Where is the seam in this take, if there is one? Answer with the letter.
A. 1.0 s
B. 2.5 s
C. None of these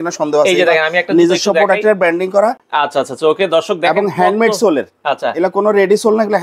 C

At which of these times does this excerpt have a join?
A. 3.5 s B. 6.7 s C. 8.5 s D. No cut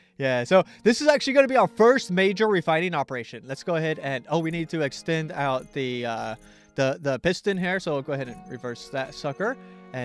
C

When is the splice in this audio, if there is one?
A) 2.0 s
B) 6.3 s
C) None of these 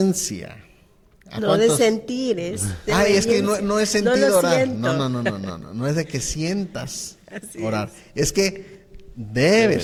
C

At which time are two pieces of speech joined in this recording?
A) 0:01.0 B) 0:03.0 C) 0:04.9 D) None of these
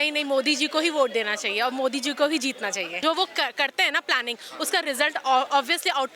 B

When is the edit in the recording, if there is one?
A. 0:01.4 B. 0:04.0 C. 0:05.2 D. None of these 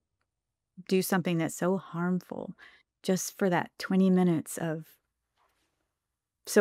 D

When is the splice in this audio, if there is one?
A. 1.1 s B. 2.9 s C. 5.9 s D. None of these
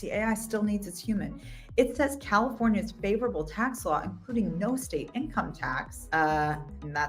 C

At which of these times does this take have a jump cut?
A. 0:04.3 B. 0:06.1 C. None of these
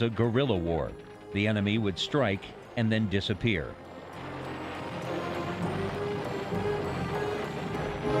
A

